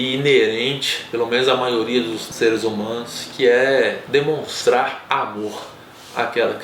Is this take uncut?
no; 1 cut; at 2.3 s

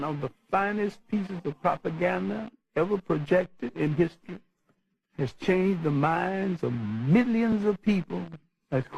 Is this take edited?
no; 0 cuts

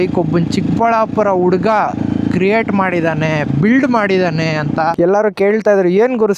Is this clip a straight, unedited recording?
no; 1 cut; at 4.9 s

